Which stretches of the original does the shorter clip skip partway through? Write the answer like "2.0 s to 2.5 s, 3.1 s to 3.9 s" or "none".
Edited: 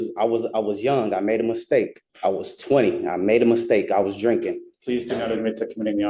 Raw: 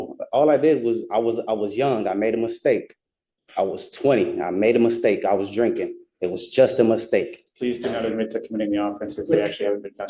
3.0 s to 3.4 s, 6.0 s to 7.4 s